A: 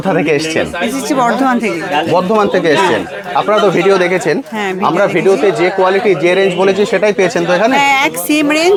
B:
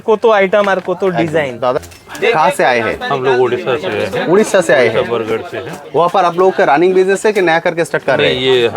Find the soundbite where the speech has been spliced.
B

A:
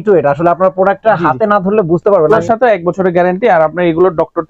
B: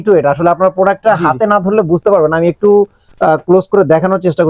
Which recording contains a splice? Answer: A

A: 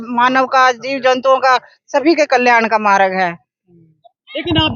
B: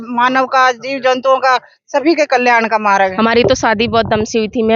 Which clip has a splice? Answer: B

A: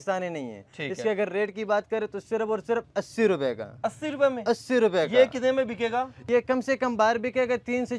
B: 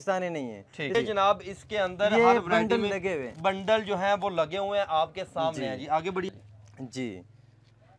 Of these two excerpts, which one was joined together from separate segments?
B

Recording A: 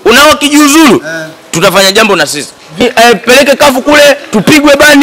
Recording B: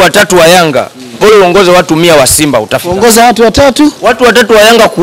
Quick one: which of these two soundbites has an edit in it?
A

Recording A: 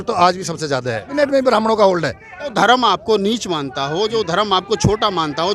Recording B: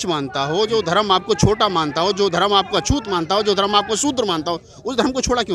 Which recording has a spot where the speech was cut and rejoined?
A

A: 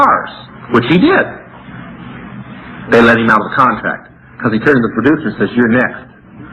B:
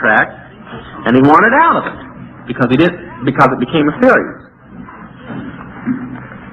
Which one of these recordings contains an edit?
B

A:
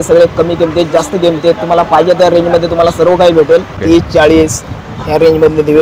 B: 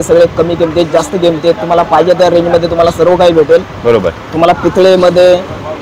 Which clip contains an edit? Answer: A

